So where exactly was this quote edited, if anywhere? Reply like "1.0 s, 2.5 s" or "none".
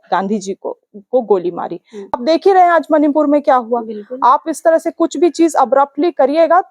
2.2 s